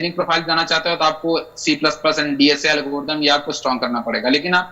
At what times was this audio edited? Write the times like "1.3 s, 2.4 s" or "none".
none